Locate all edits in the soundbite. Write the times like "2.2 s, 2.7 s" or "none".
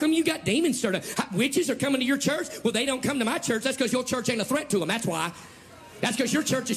none